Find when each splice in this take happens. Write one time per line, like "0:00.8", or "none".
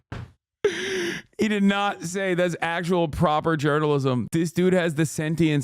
0:04.2